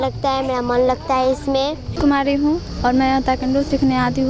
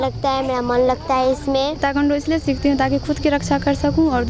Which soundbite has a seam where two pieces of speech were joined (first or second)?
second